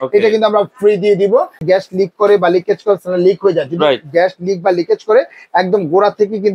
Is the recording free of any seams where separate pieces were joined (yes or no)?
no